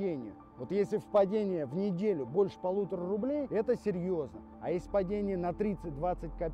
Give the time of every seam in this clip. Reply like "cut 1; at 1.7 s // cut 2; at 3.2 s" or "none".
none